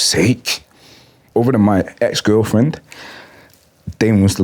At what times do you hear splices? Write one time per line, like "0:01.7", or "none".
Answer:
0:01.2